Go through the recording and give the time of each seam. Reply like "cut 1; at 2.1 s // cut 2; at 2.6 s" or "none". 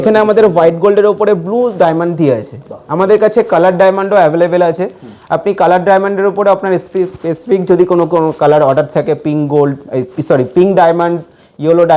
none